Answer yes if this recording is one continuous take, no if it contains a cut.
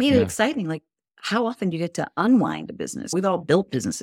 yes